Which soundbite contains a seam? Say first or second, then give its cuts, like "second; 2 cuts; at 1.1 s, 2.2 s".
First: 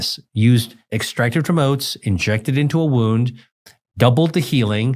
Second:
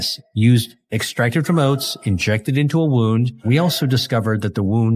second; 1 cut; at 3.4 s